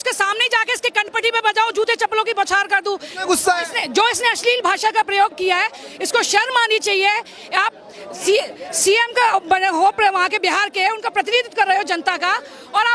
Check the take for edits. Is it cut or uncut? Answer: uncut